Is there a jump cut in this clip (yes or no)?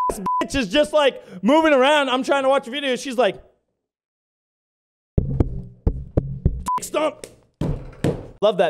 no